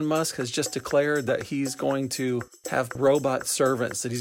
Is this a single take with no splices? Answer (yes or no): no